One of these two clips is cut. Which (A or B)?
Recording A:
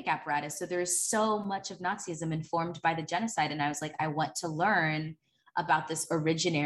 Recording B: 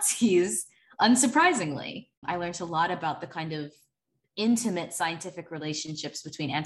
B